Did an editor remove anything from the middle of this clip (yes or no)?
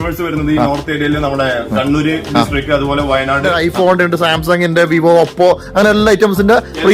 yes